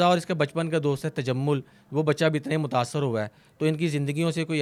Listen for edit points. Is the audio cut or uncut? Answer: uncut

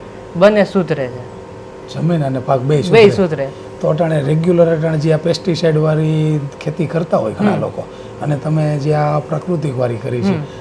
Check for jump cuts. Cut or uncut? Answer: uncut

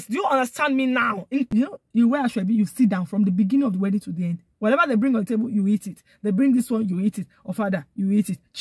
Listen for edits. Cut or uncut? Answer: cut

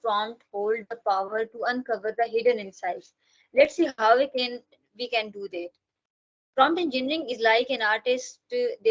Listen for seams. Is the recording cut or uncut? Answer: uncut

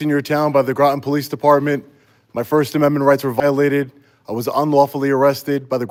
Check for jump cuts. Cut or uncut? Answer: uncut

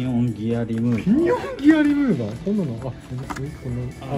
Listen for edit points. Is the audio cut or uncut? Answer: uncut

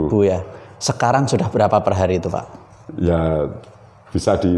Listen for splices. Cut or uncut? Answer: uncut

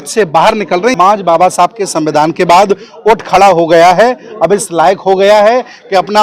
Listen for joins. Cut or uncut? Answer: cut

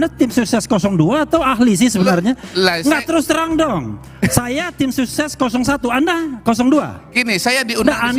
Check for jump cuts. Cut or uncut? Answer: uncut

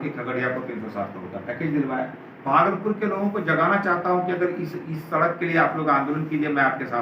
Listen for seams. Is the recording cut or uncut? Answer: cut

